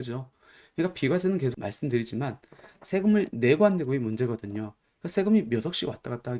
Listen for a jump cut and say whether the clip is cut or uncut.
cut